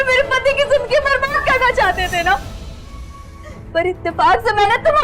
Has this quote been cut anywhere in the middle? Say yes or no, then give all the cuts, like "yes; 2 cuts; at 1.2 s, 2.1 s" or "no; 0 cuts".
no; 0 cuts